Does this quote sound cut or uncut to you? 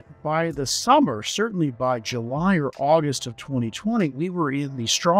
uncut